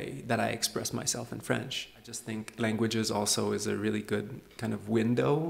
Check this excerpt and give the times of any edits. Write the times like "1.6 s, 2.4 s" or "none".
2.3 s